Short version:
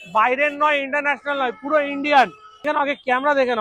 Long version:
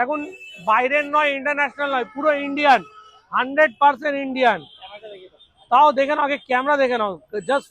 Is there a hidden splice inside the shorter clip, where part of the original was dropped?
yes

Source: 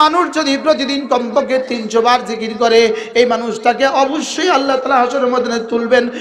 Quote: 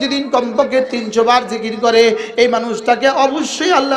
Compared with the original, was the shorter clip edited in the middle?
no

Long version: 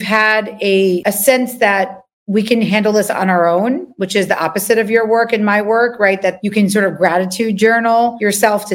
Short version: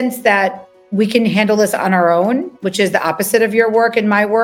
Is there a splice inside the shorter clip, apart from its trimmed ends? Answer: no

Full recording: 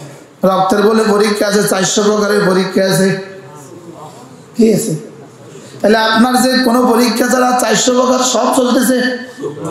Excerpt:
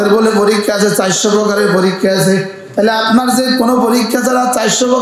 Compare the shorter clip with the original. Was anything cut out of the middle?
yes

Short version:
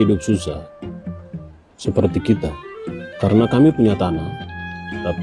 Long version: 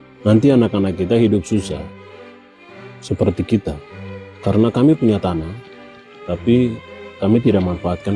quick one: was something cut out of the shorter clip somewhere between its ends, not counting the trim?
no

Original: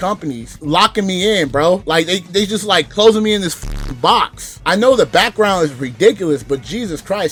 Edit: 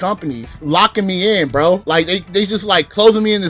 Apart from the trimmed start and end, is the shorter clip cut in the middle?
no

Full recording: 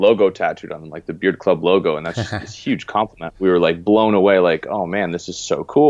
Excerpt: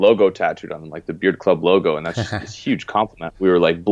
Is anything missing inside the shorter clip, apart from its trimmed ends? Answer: no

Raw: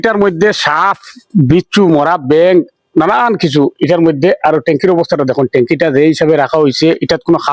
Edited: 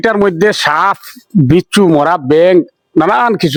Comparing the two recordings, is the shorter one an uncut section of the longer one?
yes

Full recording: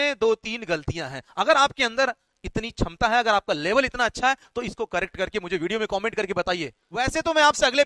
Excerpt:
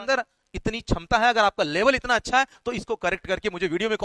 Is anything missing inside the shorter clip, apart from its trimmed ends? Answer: no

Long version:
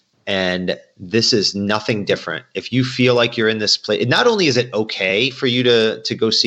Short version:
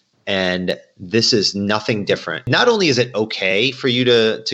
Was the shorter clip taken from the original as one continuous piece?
no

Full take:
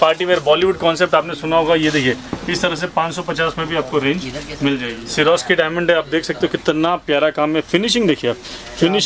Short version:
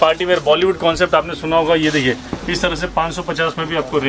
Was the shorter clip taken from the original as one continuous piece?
yes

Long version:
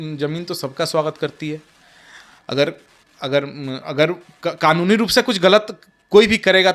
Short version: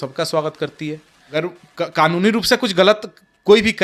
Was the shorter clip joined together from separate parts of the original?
yes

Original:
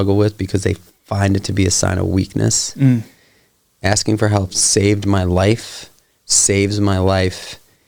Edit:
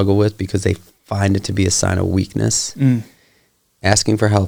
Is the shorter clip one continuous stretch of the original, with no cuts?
yes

